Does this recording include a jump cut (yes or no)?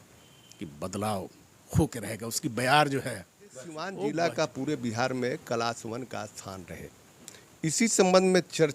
yes